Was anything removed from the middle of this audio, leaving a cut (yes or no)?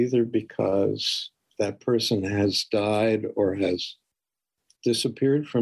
no